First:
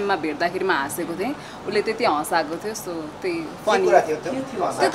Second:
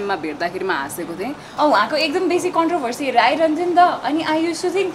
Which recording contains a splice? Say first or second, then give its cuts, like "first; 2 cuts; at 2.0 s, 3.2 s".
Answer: second; 1 cut; at 1.5 s